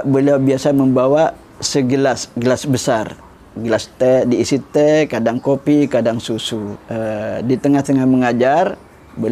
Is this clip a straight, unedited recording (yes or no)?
no